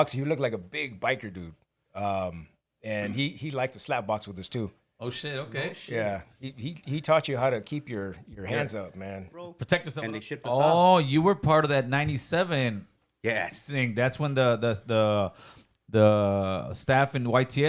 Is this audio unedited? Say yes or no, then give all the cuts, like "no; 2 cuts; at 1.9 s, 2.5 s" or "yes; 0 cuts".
no; 1 cut; at 9.9 s